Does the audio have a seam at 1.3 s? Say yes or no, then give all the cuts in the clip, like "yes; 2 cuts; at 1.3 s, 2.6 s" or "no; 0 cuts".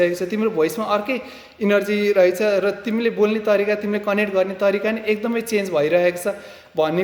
no; 0 cuts